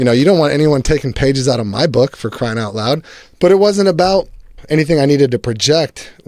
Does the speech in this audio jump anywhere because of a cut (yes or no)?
yes